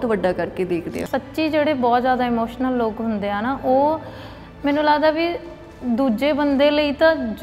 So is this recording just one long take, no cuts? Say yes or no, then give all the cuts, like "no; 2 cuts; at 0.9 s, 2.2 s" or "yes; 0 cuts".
no; 1 cut; at 1.0 s